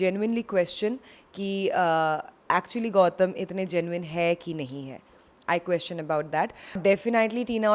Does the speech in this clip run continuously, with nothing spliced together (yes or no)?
no